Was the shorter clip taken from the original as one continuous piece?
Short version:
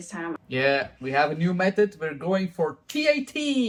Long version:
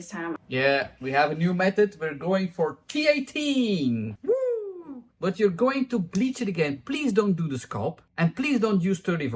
yes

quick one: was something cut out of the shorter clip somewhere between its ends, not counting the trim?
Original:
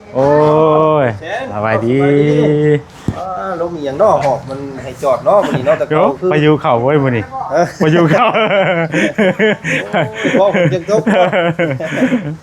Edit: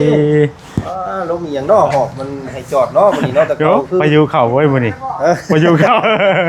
no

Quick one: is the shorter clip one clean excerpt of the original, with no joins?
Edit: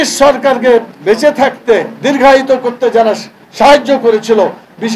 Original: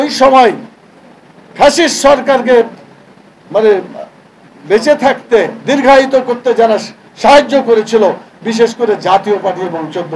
no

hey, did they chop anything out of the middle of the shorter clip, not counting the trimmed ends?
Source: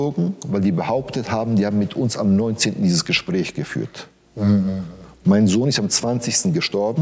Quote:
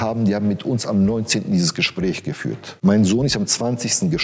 yes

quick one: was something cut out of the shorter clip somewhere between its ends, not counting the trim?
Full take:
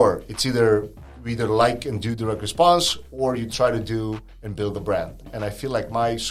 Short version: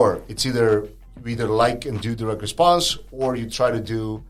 no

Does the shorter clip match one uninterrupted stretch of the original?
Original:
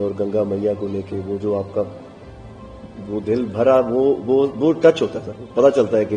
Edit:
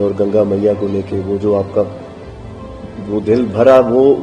yes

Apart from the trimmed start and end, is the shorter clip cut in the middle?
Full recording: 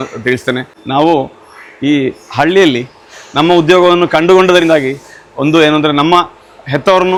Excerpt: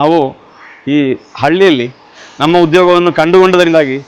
no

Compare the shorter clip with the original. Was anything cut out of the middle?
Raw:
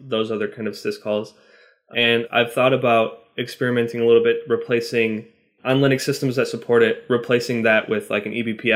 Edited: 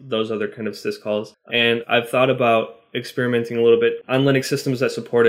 yes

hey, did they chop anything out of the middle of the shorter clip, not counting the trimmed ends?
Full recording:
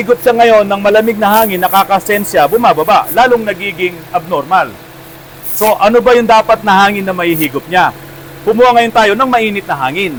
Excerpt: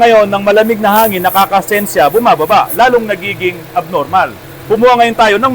yes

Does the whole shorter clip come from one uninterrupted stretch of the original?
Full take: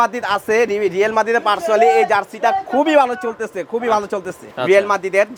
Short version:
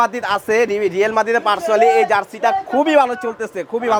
yes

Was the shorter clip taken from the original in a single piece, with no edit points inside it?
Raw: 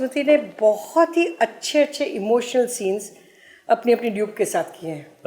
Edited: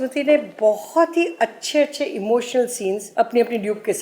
no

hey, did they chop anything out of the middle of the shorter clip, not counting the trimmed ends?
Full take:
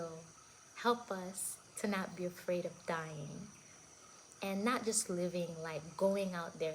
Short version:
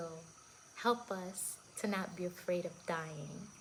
no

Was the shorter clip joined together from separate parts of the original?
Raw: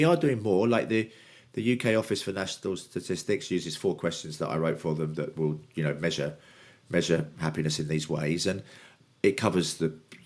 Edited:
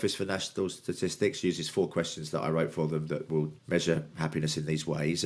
yes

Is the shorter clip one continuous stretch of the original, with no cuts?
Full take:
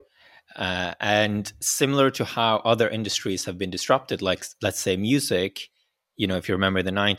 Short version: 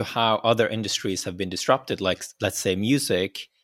yes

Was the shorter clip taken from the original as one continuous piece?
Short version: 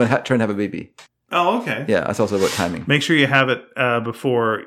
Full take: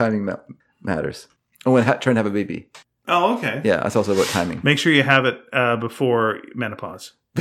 yes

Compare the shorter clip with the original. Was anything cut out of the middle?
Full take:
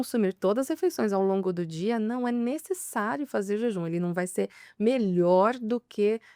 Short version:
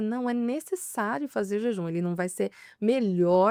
no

